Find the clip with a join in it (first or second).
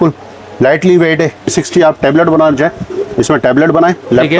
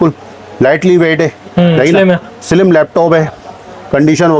first